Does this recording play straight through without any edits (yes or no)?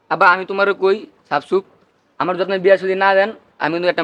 yes